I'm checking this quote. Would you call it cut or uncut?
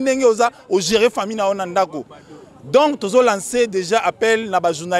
uncut